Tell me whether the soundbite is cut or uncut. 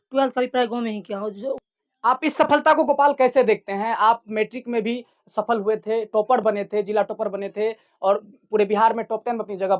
cut